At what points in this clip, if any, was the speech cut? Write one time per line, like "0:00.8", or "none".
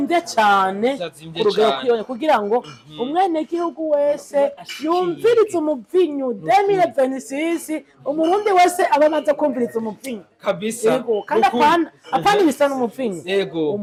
none